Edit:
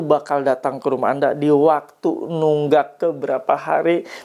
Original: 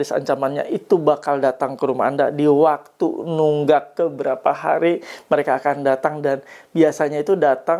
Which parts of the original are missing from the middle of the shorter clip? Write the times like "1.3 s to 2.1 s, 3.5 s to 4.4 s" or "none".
none